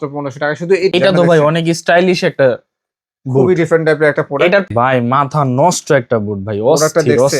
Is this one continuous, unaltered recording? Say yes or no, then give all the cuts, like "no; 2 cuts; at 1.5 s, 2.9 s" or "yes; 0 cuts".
no; 2 cuts; at 0.9 s, 4.7 s